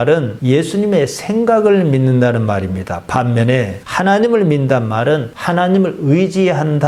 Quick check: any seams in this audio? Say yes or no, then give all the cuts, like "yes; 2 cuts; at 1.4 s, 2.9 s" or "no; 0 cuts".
no; 0 cuts